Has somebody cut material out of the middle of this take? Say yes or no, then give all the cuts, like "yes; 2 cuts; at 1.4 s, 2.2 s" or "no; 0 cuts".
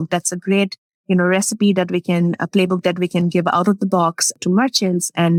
no; 0 cuts